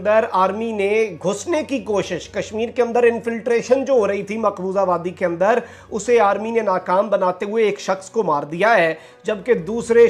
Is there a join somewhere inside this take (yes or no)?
no